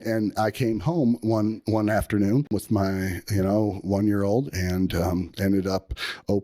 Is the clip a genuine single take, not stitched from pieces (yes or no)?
no